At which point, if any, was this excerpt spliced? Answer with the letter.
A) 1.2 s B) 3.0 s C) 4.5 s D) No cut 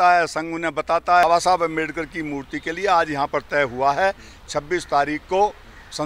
A